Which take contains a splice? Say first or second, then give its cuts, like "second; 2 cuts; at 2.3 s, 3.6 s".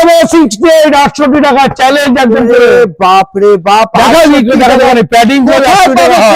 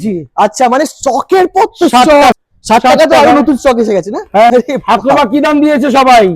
second; 2 cuts; at 2.3 s, 4.5 s